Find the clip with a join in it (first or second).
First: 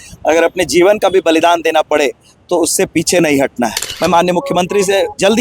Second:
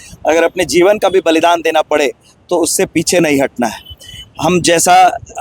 first